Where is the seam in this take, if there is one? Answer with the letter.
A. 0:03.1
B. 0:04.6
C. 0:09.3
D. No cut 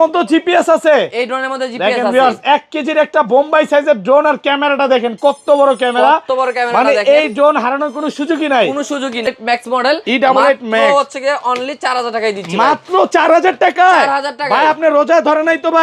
C